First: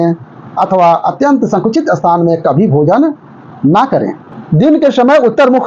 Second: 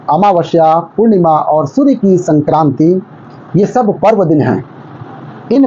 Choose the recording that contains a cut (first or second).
first